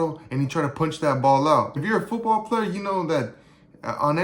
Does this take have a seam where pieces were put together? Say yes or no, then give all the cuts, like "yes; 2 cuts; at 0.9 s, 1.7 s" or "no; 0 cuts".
yes; 1 cut; at 1.7 s